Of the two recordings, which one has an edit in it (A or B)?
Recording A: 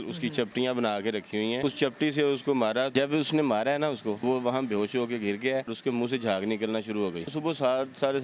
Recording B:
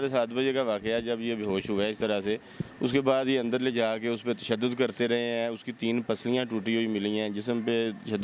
A